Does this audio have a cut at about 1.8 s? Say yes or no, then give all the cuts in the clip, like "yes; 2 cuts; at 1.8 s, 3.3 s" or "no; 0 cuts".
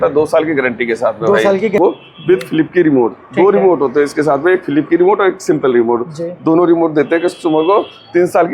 yes; 1 cut; at 1.8 s